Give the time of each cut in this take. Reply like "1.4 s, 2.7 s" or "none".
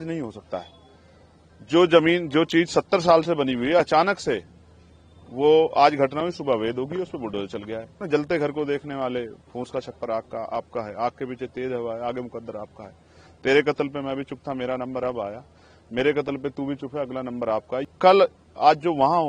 8.0 s, 17.8 s